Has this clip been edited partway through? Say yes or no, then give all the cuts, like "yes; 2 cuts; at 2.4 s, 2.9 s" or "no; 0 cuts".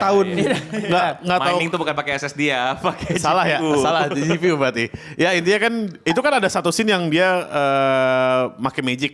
no; 0 cuts